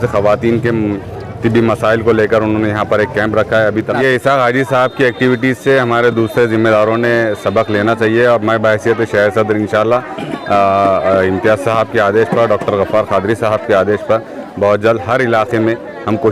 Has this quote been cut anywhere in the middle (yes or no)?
yes